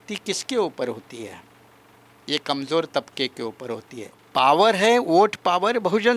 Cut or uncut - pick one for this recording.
cut